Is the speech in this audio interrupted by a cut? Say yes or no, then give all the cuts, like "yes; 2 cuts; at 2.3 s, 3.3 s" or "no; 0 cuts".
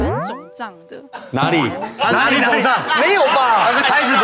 no; 0 cuts